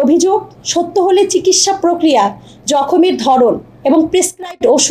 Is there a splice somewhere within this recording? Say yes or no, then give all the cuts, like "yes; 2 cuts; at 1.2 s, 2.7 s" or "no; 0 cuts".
no; 0 cuts